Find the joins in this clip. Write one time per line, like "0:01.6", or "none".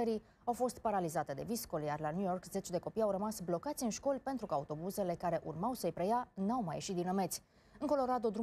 none